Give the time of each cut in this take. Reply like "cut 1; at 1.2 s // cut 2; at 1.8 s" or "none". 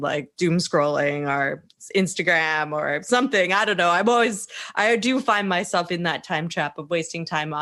none